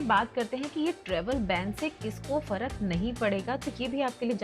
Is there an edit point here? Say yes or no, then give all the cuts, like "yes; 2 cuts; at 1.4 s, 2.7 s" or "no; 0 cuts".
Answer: no; 0 cuts